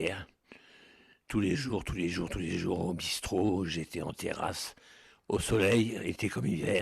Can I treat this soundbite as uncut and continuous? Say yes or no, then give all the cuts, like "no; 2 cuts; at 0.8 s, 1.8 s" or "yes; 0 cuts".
no; 1 cut; at 1.6 s